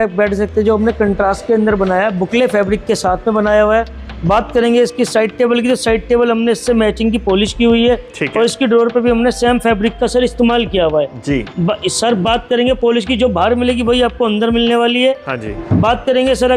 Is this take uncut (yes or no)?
yes